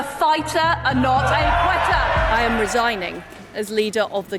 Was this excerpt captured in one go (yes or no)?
no